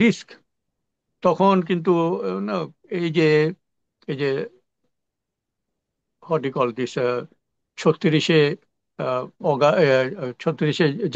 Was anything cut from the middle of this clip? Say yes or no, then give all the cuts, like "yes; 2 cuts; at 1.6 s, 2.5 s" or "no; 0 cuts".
no; 0 cuts